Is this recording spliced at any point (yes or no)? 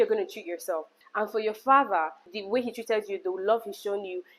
yes